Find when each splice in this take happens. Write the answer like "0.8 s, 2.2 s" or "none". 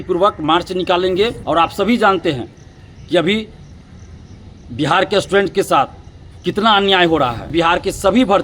1.4 s, 7.4 s